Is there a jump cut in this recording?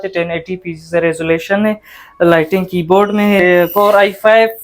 yes; 1 cut; at 3.4 s

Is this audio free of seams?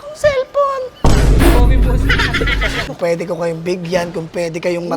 no; 1 cut; at 2.9 s

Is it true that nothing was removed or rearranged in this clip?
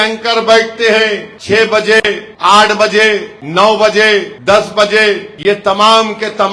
no; 5 cuts; at 1.3 s, 2.3 s, 3.4 s, 4.3 s, 5.3 s

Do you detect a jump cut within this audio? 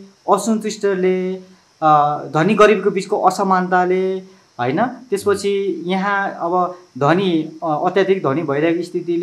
no; 0 cuts

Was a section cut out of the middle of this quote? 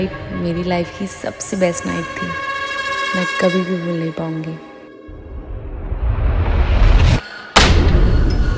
no; 0 cuts

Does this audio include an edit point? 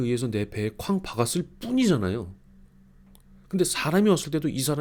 no; 0 cuts

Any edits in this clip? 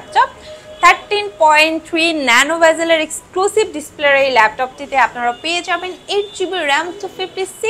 no; 0 cuts

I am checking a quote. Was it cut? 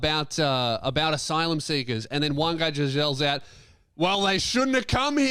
no; 0 cuts

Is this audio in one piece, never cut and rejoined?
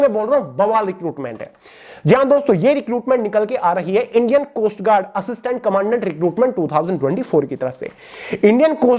yes; 0 cuts

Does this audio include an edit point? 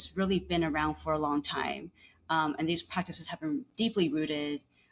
no; 0 cuts

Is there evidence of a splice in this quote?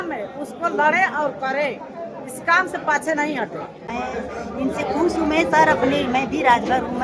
yes; 1 cut; at 3.9 s

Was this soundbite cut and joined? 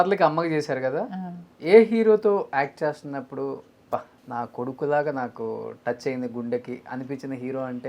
yes; 1 cut; at 4.2 s

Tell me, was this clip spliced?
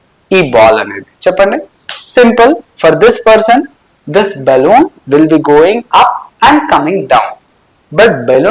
no; 0 cuts

